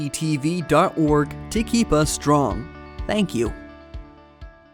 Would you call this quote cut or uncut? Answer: cut